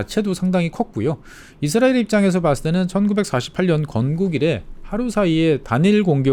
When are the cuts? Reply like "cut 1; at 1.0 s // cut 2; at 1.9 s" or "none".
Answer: none